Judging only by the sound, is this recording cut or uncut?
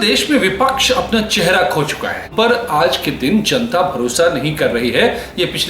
cut